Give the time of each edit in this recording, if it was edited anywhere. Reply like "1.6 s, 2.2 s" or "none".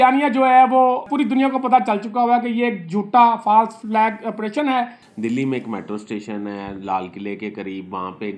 1.0 s, 3.8 s, 5.0 s